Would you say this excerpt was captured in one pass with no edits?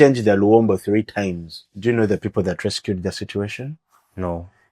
no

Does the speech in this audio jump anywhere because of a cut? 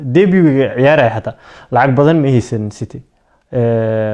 no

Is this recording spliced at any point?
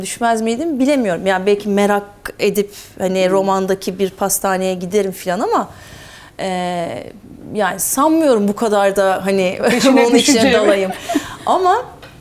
no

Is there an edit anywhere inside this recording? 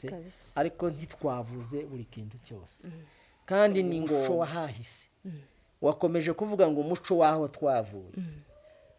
yes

